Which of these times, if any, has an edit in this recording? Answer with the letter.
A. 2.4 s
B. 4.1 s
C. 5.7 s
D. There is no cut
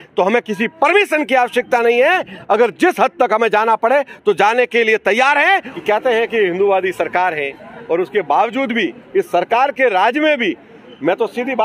C